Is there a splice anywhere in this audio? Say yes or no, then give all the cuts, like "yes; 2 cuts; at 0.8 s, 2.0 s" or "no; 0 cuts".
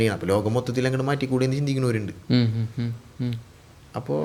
no; 0 cuts